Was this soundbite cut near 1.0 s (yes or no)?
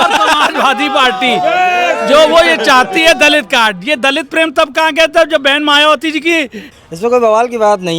no